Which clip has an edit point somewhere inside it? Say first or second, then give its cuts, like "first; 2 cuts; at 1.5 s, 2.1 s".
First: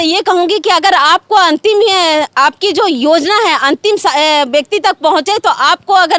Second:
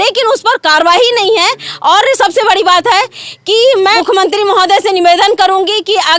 second; 1 cut; at 4.0 s